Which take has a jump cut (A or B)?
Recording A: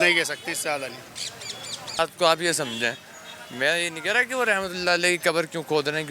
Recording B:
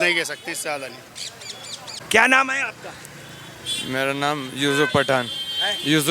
A